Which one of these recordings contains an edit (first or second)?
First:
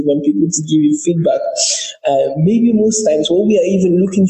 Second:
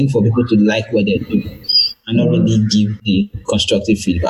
second